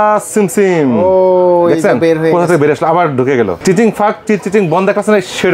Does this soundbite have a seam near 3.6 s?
yes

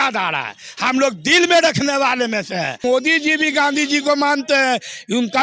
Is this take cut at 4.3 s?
no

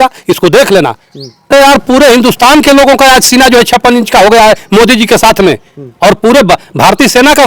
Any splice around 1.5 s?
yes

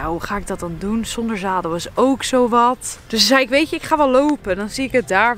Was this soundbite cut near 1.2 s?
no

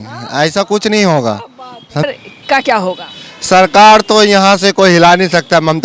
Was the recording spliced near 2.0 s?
yes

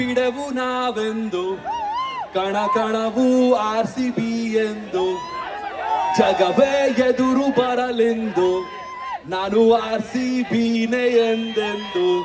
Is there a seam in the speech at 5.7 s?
no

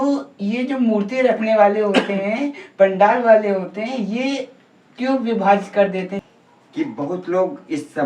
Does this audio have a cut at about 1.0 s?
no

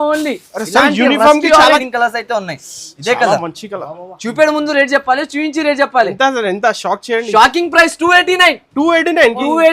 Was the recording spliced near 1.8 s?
yes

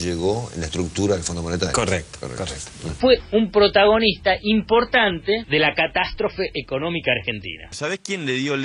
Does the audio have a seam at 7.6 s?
yes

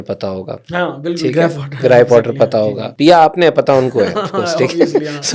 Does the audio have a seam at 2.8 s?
yes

